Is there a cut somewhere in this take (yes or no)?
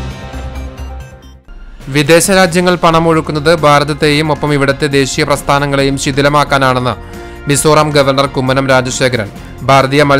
no